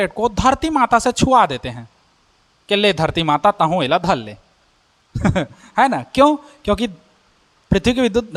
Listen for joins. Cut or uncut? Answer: uncut